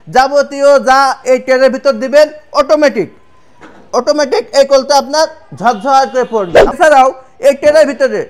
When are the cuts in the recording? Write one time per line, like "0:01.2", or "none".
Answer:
0:06.8